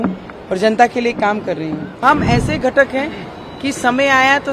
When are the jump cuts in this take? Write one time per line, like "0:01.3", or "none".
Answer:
0:02.0